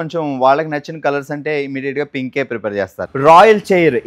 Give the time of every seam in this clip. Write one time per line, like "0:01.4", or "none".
0:03.1